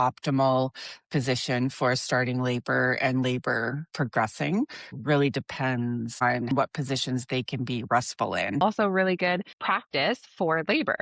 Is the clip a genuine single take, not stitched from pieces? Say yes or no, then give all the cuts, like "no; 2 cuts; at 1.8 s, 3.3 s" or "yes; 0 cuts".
no; 4 cuts; at 4.9 s, 6.4 s, 8.6 s, 9.6 s